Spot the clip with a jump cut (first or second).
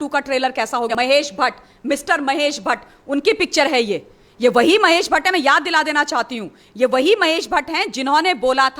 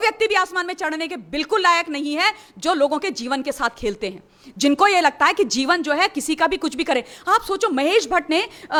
first